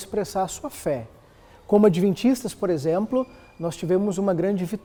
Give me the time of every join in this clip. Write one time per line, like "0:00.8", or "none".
none